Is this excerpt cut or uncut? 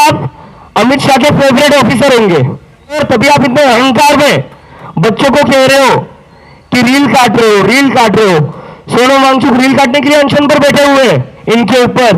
cut